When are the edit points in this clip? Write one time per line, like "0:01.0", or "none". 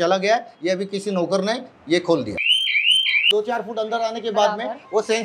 0:03.3